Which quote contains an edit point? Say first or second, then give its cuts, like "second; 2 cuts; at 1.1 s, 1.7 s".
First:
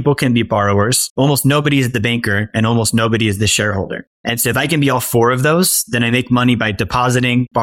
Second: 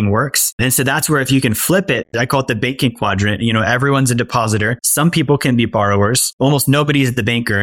second; 1 cut; at 2.1 s